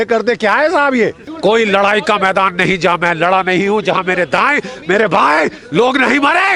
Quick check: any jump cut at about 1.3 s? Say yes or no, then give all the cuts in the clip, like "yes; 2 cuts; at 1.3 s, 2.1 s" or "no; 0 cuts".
yes; 1 cut; at 1.3 s